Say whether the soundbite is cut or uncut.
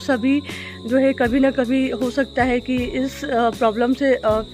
uncut